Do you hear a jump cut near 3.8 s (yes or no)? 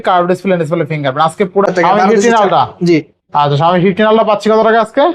no